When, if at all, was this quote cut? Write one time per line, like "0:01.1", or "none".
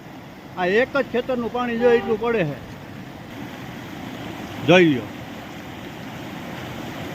none